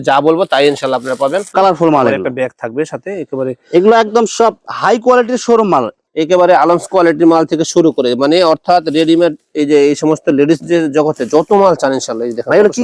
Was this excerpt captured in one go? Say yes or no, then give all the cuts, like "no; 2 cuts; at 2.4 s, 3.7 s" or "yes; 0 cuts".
no; 2 cuts; at 1.4 s, 6.0 s